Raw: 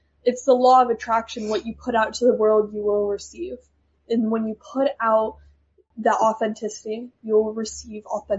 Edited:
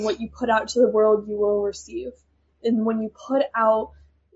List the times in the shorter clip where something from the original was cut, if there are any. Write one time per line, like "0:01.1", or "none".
none